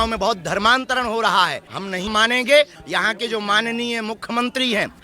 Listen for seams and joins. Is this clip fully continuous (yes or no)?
no